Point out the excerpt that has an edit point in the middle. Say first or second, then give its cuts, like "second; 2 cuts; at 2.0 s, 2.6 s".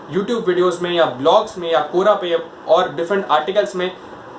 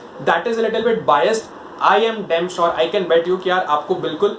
second; 1 cut; at 1.6 s